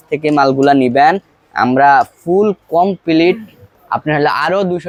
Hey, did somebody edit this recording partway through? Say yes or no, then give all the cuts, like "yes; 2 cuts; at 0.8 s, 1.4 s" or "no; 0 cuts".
no; 0 cuts